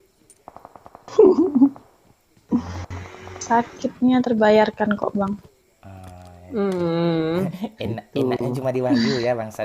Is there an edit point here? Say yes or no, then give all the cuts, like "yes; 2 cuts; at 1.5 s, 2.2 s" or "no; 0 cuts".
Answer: no; 0 cuts